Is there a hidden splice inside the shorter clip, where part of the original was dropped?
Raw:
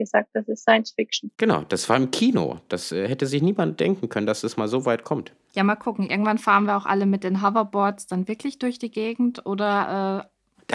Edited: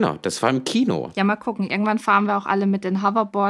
yes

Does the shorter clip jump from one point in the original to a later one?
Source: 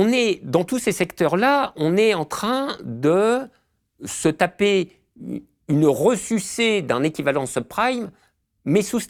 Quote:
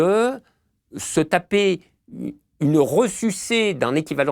no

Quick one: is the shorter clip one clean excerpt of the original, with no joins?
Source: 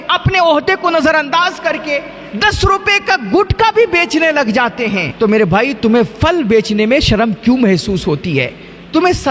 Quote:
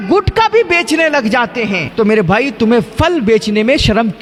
yes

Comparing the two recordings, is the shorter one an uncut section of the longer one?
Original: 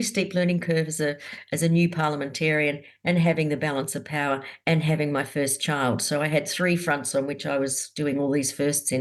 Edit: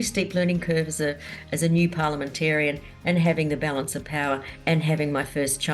yes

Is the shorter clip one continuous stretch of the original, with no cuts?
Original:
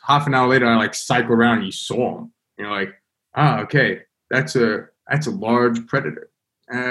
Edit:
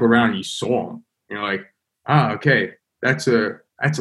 yes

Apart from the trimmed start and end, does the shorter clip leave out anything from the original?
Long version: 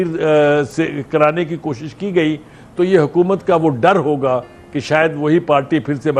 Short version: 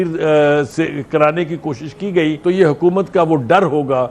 yes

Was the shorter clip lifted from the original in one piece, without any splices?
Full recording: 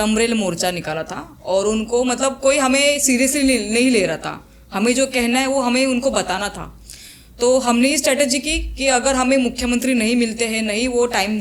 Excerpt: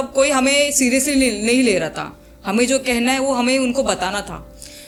yes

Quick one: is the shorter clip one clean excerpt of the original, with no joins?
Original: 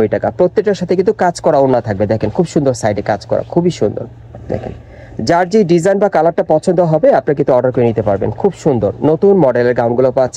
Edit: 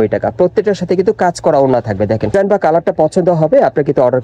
no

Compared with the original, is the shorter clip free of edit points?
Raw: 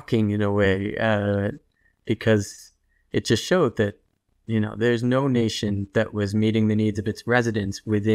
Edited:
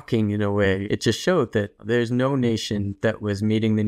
no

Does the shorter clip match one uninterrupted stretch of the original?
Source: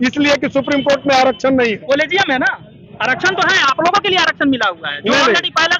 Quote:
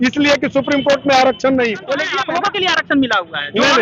no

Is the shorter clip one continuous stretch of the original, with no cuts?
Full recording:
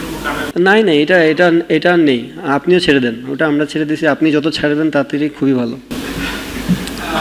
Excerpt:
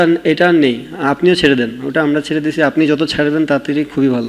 yes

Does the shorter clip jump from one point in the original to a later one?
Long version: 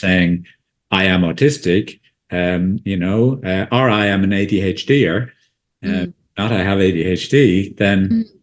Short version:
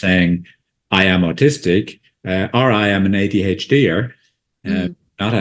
yes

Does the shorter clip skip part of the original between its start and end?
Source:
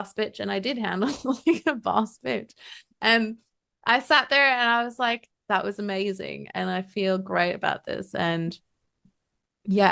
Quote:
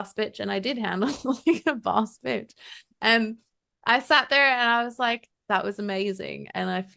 no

